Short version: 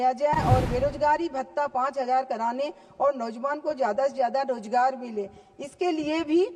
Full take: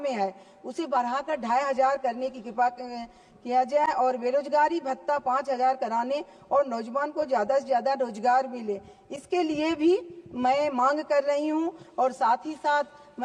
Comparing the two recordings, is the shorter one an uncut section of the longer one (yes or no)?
yes